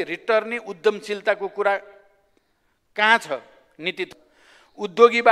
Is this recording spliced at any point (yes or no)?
yes